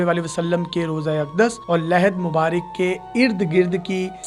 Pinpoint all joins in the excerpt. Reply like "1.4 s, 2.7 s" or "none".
none